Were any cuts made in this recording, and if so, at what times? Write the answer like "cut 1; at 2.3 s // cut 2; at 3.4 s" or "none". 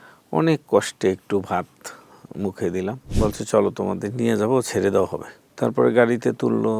cut 1; at 3.0 s // cut 2; at 5.4 s